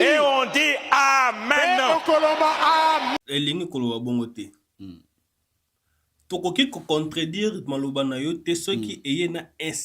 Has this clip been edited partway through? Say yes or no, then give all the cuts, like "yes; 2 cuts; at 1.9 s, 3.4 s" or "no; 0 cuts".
yes; 1 cut; at 3.2 s